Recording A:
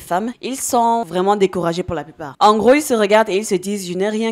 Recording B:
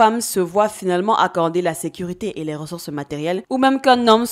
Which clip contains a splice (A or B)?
A